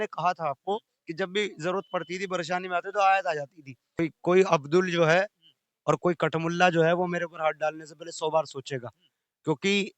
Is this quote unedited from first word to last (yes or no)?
no